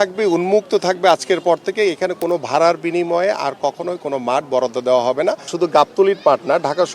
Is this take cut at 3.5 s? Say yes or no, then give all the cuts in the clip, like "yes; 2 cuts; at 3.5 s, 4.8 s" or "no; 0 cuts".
no; 1 cut; at 5.5 s